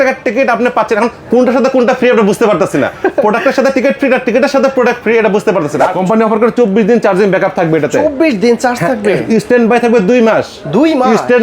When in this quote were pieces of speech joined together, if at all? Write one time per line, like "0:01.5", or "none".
0:05.9

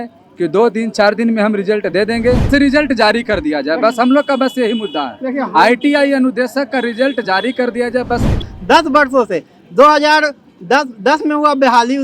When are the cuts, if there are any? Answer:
0:02.5
0:08.4

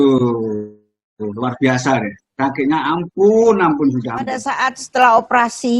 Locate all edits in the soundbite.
0:04.4

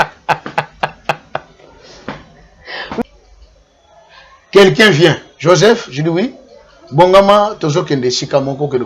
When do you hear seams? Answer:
0:02.9

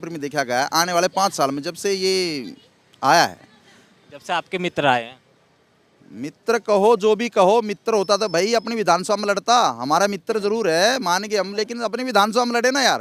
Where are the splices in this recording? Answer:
none

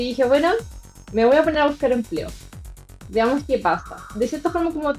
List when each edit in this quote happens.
0:04.0

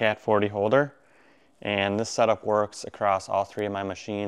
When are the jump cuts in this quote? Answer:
none

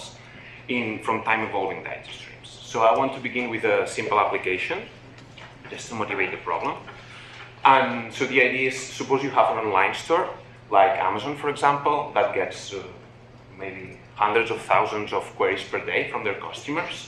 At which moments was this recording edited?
0:07.2

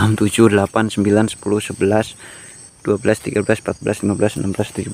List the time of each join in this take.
none

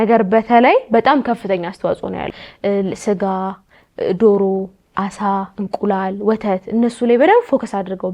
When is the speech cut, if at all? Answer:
0:02.2

